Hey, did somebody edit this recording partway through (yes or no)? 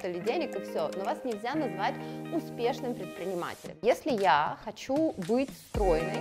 yes